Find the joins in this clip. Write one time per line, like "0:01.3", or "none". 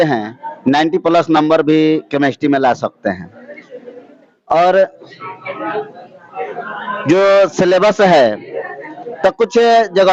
none